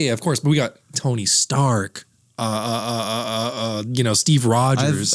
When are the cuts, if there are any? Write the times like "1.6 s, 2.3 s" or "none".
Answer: none